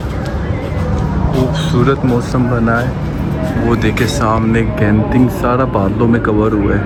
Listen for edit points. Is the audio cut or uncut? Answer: uncut